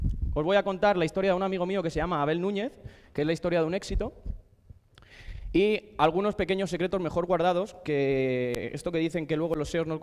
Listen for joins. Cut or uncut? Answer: uncut